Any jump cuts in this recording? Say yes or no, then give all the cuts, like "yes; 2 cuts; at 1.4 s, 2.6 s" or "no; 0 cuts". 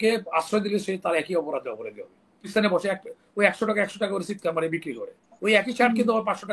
yes; 1 cut; at 2.5 s